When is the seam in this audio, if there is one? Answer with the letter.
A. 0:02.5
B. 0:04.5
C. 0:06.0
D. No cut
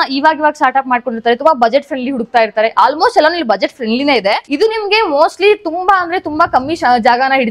B